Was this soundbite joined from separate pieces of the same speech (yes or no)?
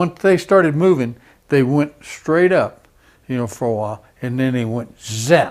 no